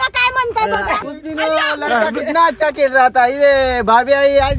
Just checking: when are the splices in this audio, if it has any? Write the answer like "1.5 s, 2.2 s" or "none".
1.0 s